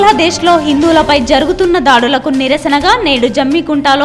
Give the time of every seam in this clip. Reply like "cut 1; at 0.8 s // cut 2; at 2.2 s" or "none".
none